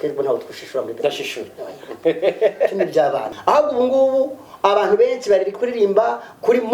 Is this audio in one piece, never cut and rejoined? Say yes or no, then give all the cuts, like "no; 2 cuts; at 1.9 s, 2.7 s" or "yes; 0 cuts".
no; 1 cut; at 3.3 s